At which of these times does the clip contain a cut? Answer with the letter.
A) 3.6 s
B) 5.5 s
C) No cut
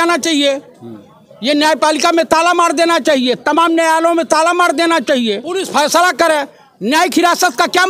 B